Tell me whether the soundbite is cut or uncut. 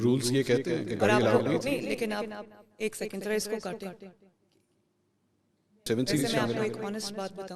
cut